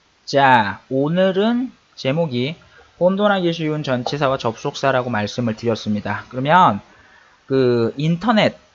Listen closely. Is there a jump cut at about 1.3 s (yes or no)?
yes